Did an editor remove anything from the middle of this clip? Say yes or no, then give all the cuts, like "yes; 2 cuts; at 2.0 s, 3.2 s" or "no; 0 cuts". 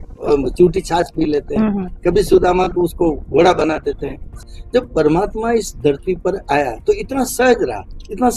yes; 1 cut; at 4.3 s